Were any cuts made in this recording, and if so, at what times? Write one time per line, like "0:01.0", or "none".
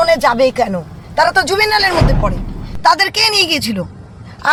none